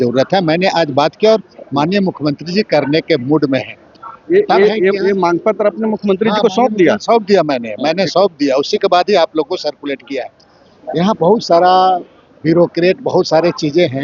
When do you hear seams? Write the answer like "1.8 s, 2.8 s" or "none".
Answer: none